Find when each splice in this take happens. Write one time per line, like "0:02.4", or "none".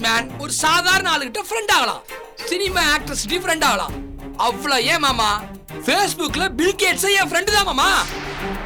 none